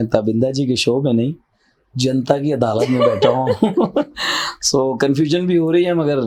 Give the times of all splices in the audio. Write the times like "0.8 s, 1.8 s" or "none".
none